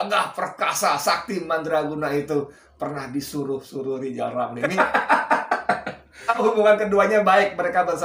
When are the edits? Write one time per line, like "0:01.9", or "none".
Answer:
0:04.6
0:06.4